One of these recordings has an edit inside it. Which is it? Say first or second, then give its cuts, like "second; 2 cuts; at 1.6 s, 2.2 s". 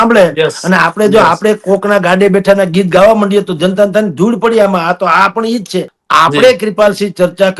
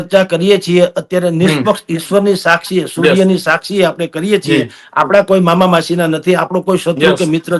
first; 1 cut; at 6.0 s